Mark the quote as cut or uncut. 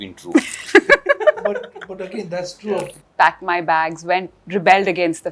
cut